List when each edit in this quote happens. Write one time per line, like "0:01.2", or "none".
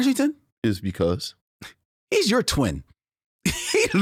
none